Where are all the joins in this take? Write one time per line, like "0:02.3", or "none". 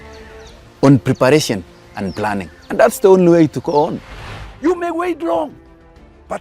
0:04.1